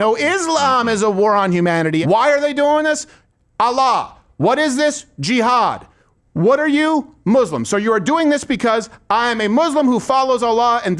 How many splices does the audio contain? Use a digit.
1